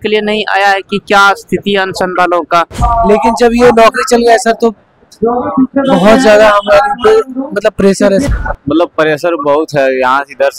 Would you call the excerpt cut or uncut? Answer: cut